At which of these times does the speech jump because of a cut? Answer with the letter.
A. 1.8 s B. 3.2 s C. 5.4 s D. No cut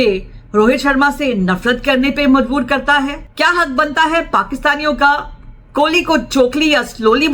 B